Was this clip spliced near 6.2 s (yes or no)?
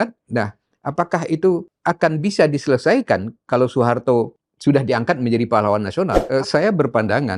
yes